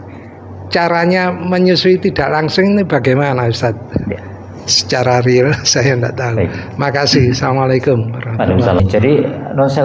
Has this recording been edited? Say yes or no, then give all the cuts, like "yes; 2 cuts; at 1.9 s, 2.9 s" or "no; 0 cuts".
yes; 1 cut; at 8.8 s